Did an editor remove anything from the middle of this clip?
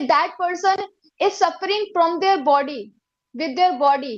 no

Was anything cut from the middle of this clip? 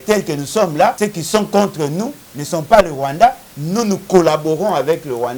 yes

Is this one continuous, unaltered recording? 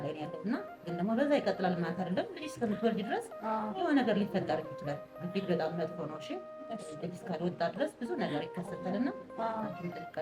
yes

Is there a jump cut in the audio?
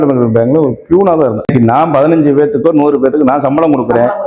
yes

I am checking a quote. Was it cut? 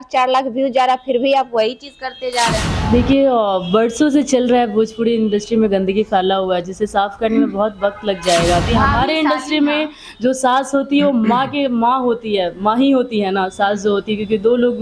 yes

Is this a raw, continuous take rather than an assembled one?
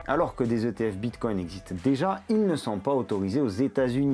yes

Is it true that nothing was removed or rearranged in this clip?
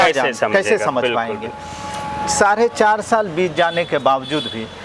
yes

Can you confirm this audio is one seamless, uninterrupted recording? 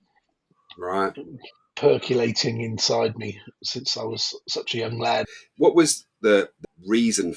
no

